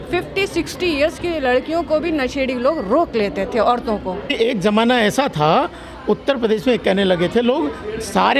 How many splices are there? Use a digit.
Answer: 1